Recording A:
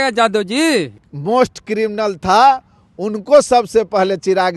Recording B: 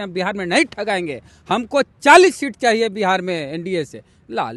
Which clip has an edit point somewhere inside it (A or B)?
A